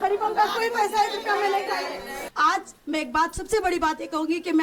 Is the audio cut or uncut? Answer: cut